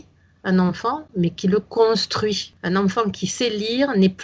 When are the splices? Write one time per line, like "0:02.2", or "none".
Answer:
0:02.5